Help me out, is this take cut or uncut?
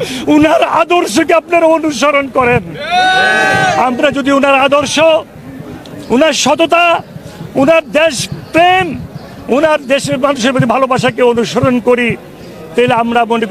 uncut